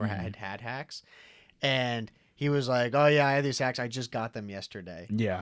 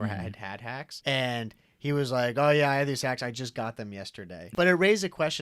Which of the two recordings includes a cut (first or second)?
second